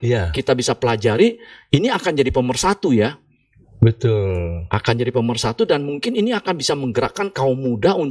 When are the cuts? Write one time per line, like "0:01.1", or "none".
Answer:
none